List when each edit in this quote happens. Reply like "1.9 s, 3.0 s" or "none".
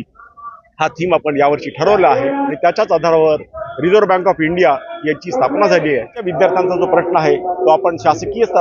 2.5 s, 6.2 s